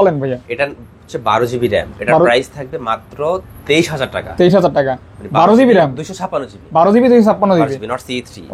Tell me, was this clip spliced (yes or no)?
no